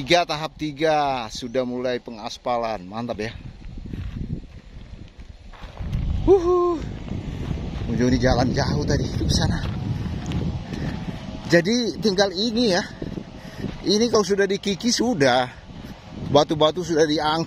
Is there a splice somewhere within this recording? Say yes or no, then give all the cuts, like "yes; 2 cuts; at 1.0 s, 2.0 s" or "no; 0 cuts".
no; 0 cuts